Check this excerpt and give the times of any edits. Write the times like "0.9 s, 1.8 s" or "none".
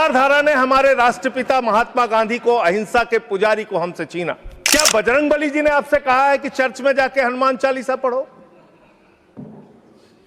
4.5 s